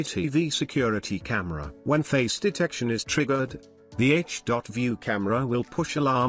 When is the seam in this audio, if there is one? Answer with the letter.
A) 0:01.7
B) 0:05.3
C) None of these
A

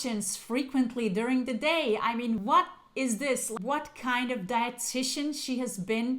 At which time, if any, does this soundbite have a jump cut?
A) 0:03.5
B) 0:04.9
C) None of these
A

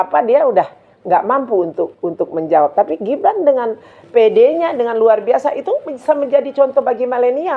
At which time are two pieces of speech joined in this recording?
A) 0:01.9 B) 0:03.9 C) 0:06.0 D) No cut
D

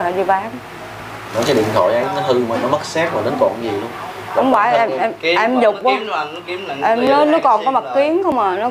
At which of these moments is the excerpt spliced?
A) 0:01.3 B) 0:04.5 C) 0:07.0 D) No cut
A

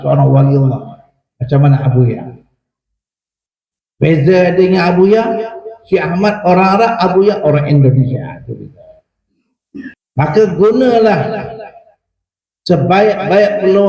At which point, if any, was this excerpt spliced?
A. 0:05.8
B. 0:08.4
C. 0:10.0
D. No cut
C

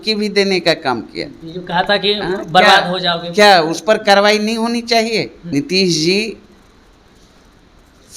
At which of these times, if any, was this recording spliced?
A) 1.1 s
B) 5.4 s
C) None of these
B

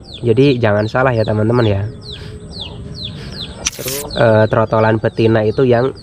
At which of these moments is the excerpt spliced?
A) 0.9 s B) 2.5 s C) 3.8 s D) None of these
C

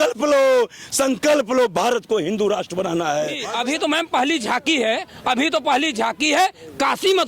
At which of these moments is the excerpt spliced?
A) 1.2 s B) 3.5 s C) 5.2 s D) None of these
B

